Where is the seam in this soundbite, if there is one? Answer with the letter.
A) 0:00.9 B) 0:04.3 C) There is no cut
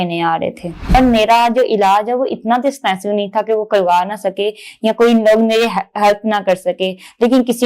A